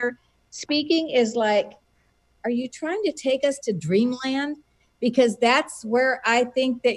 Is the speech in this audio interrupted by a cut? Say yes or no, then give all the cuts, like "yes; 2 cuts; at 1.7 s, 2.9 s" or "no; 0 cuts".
no; 0 cuts